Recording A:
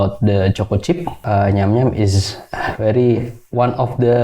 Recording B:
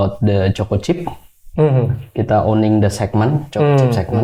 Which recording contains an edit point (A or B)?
A